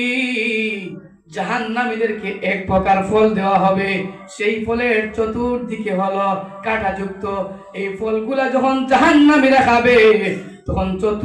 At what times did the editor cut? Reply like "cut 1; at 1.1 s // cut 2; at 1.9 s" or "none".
none